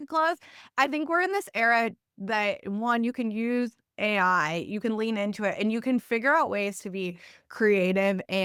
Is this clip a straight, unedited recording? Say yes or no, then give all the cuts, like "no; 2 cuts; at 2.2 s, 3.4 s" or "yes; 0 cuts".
yes; 0 cuts